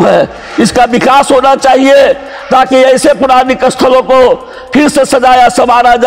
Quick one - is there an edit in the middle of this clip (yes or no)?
no